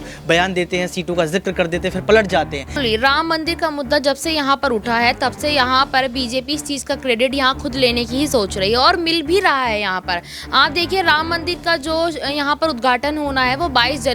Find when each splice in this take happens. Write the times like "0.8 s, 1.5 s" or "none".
2.7 s